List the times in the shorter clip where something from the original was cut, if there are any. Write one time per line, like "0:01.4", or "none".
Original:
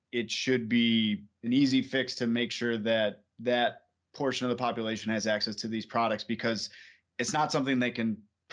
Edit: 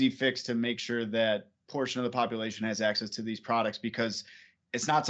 0:01.6